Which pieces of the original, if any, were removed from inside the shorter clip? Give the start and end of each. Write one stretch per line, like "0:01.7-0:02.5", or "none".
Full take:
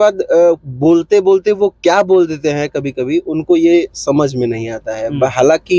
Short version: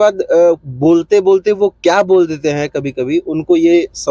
none